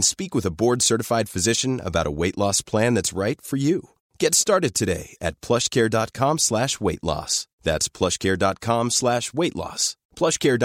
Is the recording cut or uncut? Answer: uncut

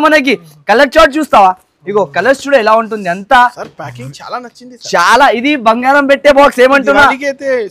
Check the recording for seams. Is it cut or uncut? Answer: uncut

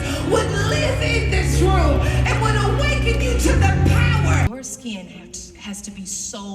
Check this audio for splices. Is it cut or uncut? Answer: cut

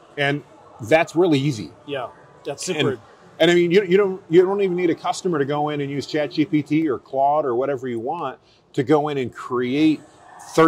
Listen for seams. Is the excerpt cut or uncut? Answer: uncut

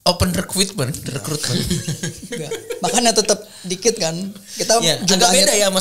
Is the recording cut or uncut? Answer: uncut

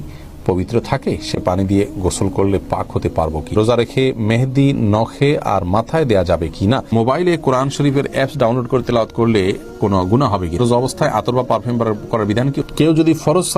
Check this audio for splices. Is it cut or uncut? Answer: cut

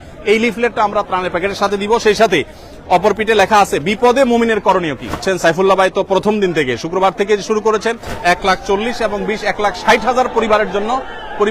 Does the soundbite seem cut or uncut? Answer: cut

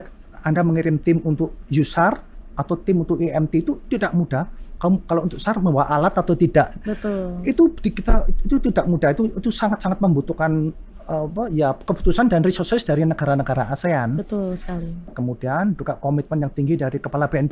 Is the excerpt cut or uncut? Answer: cut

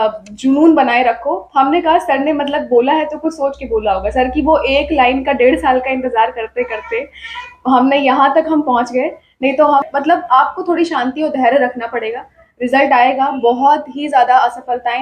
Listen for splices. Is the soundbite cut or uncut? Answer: cut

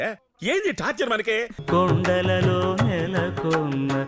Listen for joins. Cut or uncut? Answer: cut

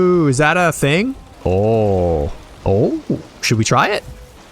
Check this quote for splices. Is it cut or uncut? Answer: cut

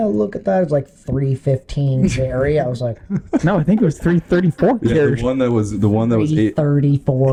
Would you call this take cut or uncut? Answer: uncut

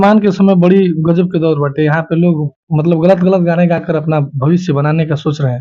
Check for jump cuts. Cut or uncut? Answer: uncut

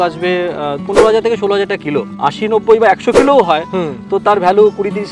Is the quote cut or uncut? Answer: cut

